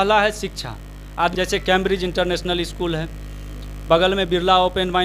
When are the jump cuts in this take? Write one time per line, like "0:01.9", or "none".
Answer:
0:01.3

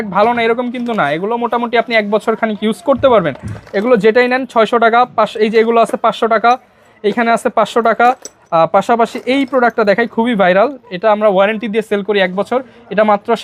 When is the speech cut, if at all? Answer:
none

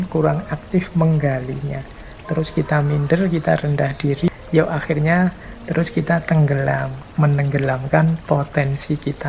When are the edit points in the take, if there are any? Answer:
0:04.3
0:07.0

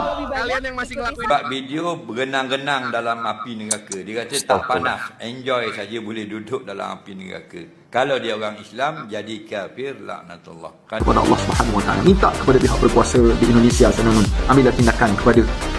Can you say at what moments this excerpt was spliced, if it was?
0:01.3
0:11.0

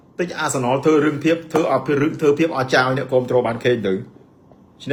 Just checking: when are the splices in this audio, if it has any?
none

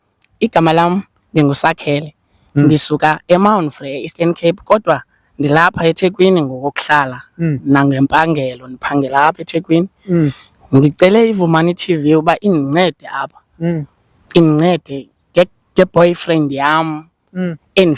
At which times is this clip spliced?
none

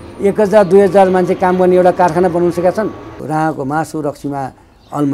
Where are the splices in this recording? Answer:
0:03.1

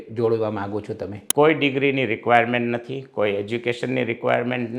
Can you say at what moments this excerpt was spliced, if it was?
0:01.2

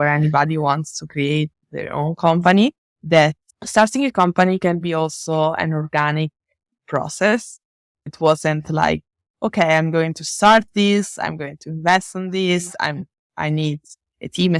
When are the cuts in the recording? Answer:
0:01.6
0:08.1

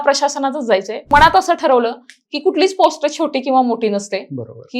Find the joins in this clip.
0:01.1

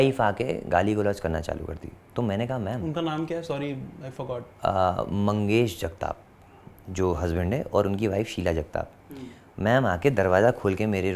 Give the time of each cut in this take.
none

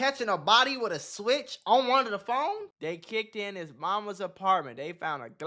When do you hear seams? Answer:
0:02.7

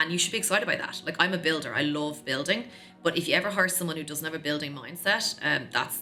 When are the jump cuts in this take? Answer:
none

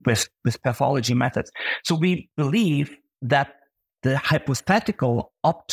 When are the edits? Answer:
0:02.3

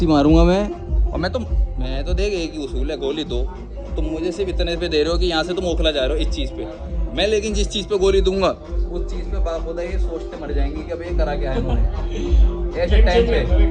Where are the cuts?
none

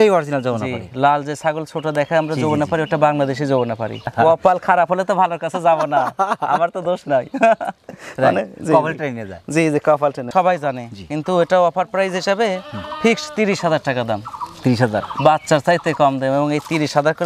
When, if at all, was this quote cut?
0:04.1
0:10.2

